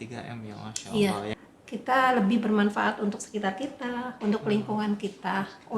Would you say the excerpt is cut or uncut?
cut